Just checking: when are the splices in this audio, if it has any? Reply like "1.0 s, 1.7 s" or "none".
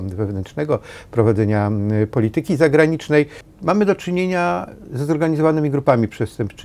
3.4 s